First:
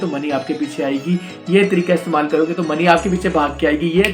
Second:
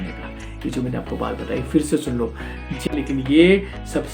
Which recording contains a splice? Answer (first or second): second